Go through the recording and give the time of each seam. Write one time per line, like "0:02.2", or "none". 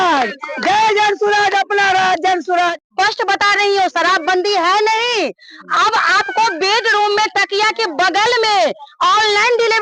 0:02.8

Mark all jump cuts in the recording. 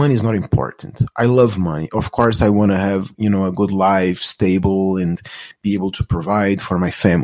none

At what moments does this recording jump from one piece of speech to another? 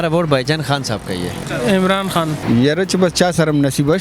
0:01.4
0:02.4

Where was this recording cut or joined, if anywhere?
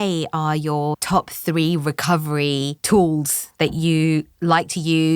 0:01.0
0:02.8

